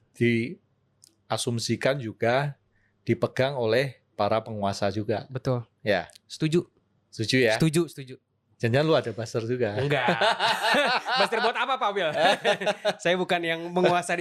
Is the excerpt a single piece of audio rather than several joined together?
yes; 0 cuts

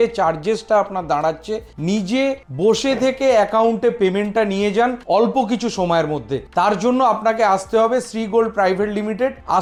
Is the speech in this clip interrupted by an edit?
no; 0 cuts

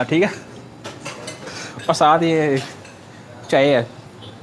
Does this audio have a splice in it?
no; 0 cuts

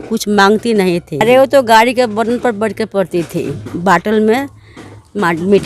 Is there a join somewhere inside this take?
yes; 2 cuts; at 1.2 s, 3.6 s

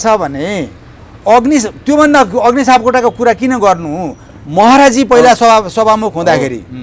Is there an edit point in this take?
no; 0 cuts

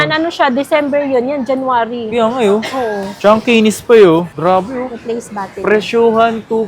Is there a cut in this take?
yes; 1 cut; at 4.3 s

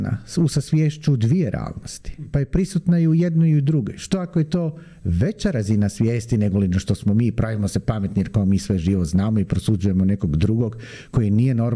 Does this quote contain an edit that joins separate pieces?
no; 0 cuts

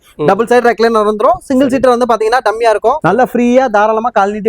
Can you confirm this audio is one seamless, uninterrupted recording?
no; 1 cut; at 3.0 s

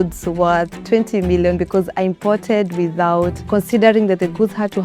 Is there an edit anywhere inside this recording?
yes; 1 cut; at 3.4 s

